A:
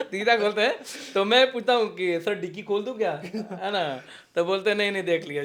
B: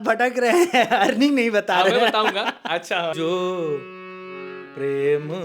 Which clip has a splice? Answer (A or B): B